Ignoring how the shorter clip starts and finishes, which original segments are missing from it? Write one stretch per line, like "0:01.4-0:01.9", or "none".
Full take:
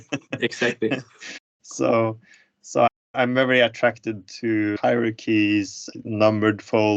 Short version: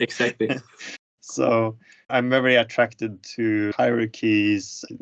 0:02.4-0:03.0